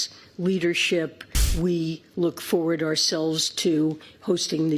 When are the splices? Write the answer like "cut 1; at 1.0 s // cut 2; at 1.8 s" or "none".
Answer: cut 1; at 1.4 s